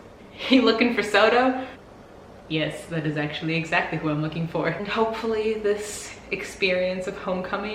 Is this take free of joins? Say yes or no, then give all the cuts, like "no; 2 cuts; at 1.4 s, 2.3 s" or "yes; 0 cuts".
no; 2 cuts; at 1.7 s, 4.9 s